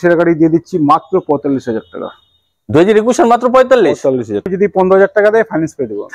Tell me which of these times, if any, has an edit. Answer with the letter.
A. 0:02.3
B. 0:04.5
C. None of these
B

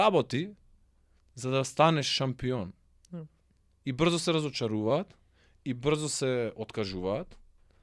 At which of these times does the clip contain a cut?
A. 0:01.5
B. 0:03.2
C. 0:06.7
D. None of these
D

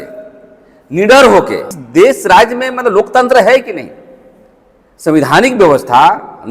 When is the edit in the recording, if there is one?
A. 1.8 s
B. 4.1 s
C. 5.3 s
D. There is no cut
A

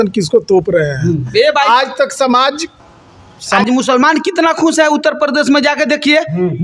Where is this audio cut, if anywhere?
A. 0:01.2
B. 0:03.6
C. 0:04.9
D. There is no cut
B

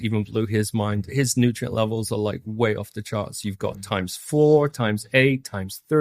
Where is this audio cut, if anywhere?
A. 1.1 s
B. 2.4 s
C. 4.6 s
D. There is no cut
A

